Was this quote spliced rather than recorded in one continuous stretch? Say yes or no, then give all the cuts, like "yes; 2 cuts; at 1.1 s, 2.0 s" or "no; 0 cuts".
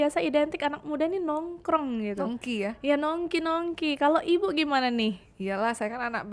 no; 0 cuts